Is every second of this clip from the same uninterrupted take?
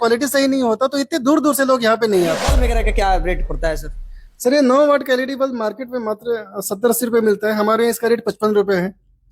no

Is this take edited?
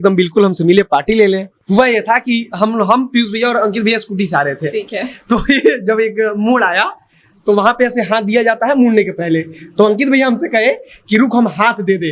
yes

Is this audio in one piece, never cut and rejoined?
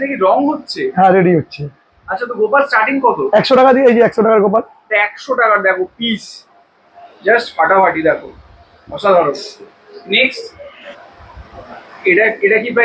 yes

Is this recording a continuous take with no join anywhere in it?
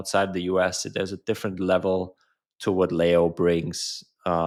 yes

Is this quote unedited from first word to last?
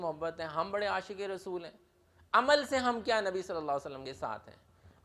no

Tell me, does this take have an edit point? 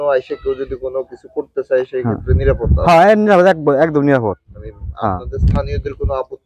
no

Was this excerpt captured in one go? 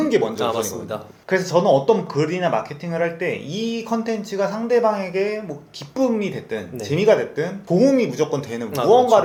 yes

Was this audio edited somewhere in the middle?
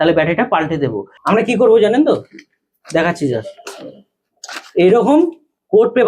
yes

